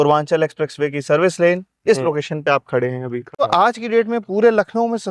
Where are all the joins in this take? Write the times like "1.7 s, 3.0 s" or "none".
3.4 s